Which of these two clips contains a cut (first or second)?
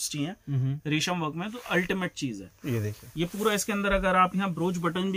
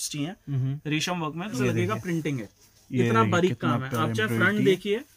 second